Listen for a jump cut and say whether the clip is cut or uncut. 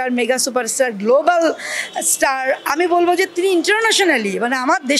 uncut